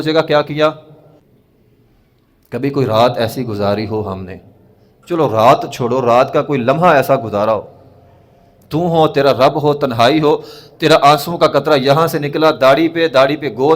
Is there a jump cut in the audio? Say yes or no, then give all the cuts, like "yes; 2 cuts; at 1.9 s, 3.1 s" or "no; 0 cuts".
yes; 1 cut; at 1.2 s